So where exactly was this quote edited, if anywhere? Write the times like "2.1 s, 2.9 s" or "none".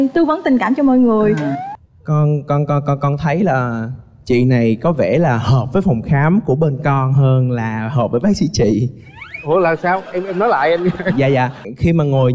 1.7 s